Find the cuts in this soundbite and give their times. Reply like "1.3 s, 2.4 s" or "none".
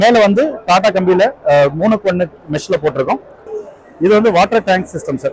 3.4 s